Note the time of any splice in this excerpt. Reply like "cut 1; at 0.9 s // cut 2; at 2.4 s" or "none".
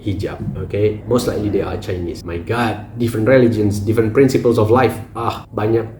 none

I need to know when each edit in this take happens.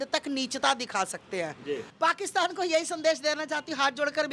cut 1; at 1.9 s

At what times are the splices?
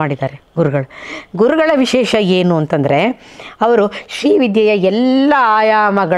none

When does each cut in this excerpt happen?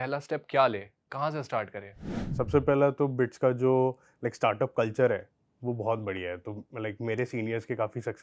cut 1; at 2.1 s

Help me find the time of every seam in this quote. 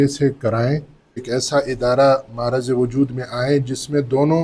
cut 1; at 1.2 s

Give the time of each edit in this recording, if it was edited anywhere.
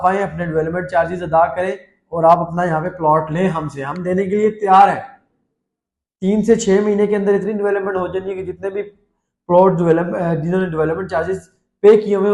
none

